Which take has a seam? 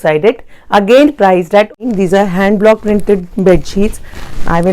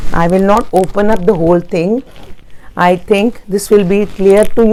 first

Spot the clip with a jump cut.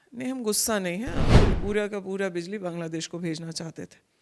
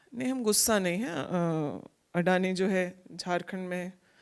first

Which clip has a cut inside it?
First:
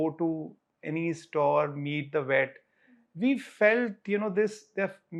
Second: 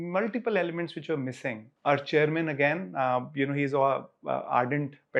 second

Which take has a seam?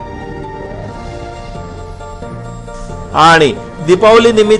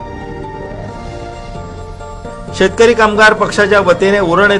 second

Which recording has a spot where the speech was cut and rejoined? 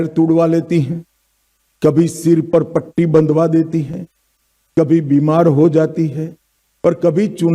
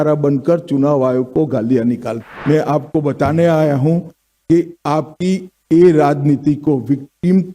second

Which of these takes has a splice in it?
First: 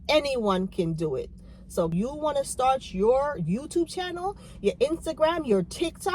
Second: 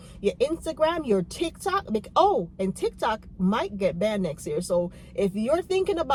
first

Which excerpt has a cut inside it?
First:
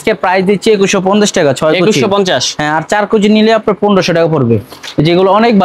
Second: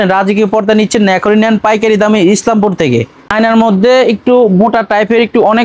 second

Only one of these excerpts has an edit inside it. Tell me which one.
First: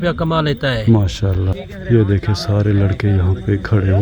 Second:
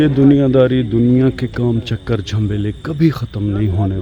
first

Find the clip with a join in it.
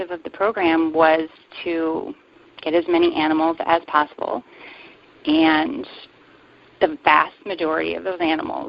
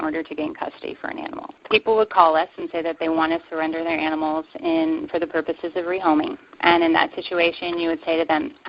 second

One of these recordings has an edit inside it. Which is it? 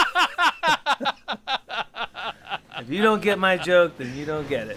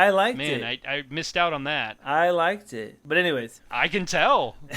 second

